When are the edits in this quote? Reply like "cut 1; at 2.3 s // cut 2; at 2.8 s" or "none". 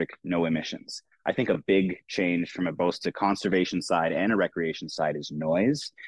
none